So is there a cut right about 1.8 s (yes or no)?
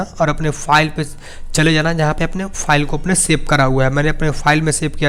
no